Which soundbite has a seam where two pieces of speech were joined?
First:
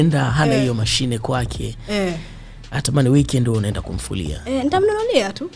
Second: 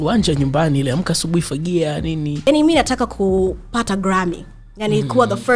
second; 1 cut; at 2.4 s

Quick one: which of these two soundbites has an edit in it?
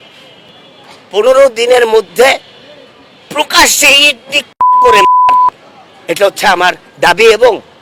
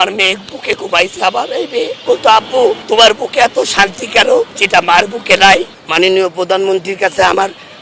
second; 2 cuts; at 2.0 s, 5.7 s

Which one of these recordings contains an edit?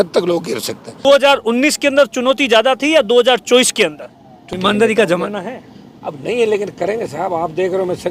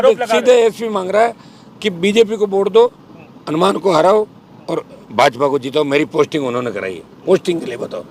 first; 2 cuts; at 1.0 s, 4.4 s

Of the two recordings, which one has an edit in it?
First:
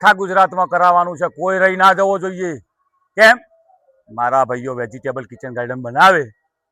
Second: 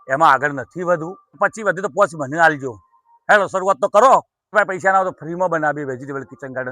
second; 2 cuts; at 1.4 s, 4.5 s

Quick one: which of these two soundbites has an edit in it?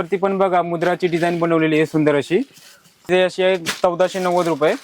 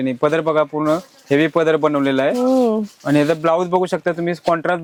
first; 1 cut; at 3.1 s

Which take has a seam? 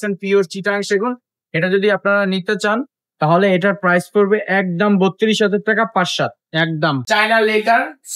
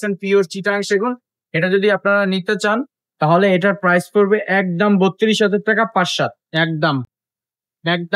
first; 1 cut; at 7.0 s

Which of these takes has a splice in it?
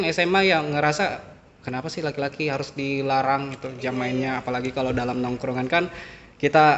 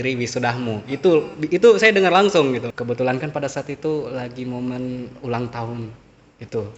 second; 1 cut; at 2.7 s

